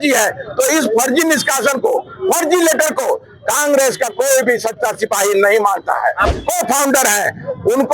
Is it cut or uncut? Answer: cut